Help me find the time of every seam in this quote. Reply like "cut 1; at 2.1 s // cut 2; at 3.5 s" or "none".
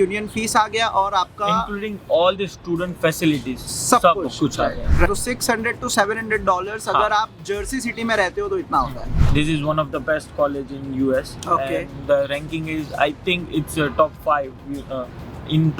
cut 1; at 5.1 s // cut 2; at 9.2 s